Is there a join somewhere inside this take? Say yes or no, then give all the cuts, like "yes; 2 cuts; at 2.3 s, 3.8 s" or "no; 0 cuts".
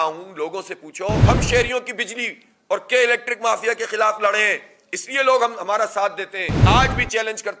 yes; 2 cuts; at 1.2 s, 6.5 s